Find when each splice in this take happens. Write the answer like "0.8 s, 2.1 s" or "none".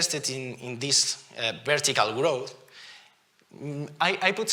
none